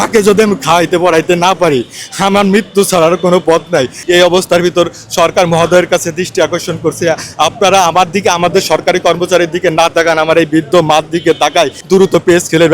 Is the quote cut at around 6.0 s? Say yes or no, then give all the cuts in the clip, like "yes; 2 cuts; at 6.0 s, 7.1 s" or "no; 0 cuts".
no; 2 cuts; at 4.0 s, 11.8 s